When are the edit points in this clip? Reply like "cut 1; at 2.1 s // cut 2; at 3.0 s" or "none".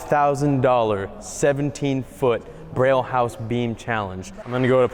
none